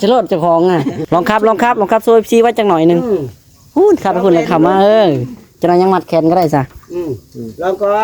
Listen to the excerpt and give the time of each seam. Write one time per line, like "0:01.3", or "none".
0:01.0